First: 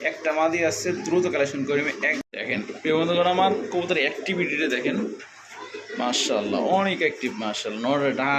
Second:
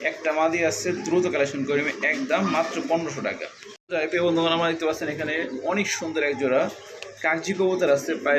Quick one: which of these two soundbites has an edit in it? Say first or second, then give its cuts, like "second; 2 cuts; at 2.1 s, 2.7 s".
first; 1 cut; at 2.2 s